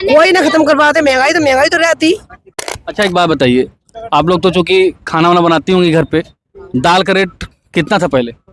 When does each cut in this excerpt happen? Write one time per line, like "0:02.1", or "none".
0:02.6